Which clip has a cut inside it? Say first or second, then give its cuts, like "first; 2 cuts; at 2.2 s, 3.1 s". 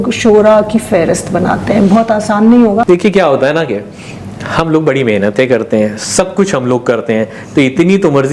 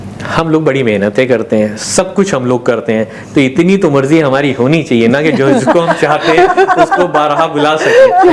first; 1 cut; at 2.8 s